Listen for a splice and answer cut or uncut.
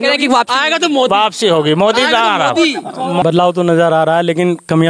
cut